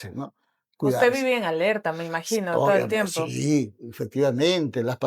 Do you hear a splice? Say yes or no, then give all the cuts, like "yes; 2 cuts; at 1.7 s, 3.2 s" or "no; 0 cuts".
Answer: no; 0 cuts